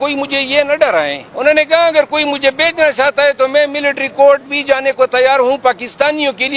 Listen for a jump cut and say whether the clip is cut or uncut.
cut